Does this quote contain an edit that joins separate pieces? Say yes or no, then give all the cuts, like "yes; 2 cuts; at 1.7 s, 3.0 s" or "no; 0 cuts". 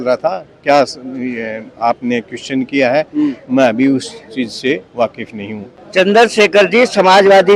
yes; 1 cut; at 5.7 s